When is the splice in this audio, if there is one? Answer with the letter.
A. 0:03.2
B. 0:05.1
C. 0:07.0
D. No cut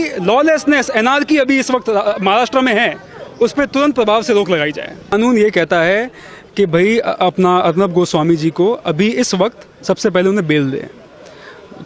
B